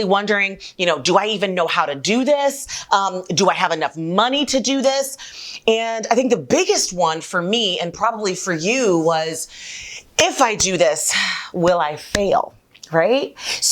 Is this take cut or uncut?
cut